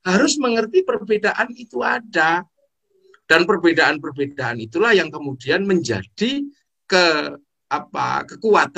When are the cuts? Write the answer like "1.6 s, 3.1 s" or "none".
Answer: none